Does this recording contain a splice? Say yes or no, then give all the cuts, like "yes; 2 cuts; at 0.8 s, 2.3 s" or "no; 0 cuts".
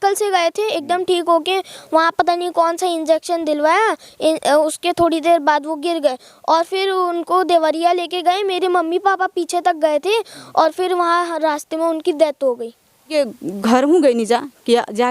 yes; 1 cut; at 13.2 s